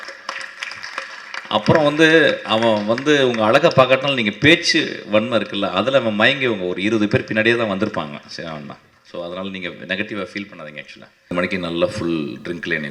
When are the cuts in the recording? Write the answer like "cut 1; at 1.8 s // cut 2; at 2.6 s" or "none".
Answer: cut 1; at 11.3 s